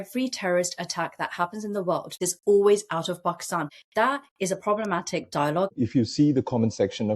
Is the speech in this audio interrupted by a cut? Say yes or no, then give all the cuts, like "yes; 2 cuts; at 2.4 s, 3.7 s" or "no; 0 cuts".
yes; 3 cuts; at 2.2 s, 3.7 s, 5.7 s